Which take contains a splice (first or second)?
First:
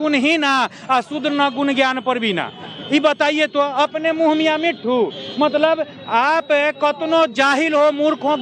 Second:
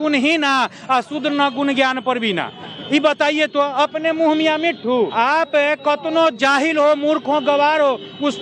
second